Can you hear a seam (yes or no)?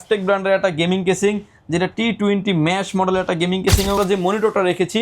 yes